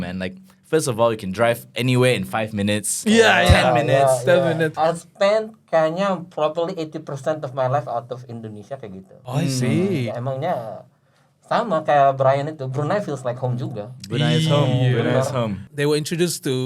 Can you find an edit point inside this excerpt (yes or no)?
yes